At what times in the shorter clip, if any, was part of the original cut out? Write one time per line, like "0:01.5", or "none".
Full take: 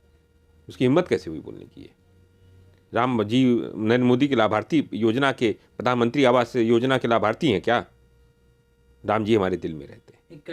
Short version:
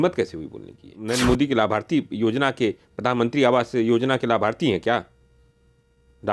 0:01.0